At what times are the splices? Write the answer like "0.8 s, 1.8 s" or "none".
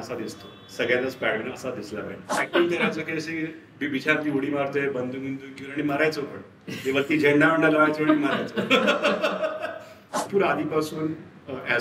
2.4 s, 10.1 s

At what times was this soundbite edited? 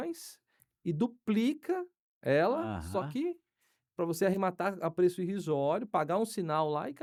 none

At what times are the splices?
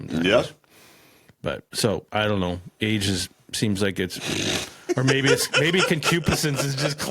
1.7 s

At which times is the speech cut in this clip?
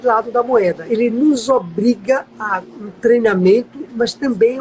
0.8 s, 2.4 s

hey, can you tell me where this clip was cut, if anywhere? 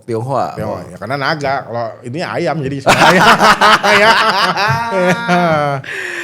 none

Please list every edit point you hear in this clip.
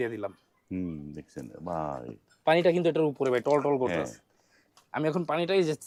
none

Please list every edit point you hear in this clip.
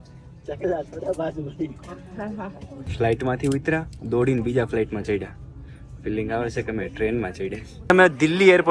2.8 s, 7.8 s

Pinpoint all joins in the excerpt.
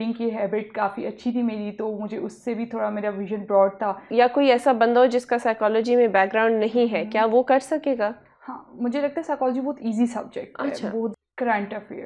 4.1 s, 11.1 s

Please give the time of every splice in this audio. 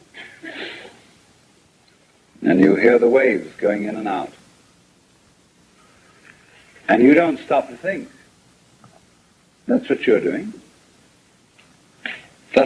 5.9 s

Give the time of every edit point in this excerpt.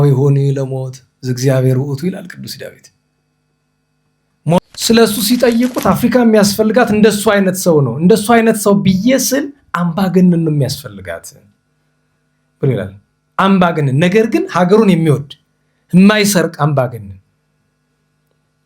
4.6 s

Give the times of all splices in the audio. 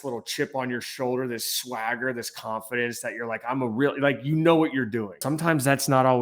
5.2 s

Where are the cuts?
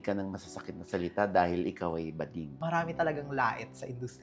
2.5 s

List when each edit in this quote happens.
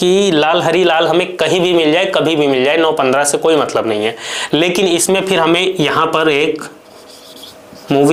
none

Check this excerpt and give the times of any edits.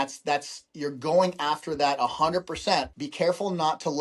3.0 s

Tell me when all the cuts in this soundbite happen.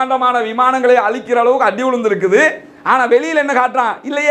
none

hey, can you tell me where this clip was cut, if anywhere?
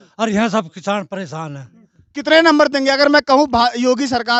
none

